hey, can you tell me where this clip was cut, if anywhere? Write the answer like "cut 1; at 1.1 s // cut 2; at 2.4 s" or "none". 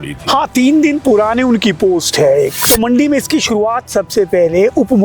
cut 1; at 2.6 s

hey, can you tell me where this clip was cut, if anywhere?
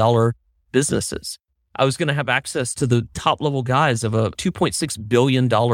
cut 1; at 2.8 s // cut 2; at 4.4 s

